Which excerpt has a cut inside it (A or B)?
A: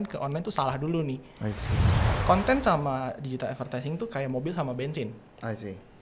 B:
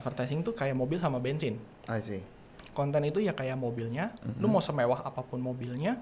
A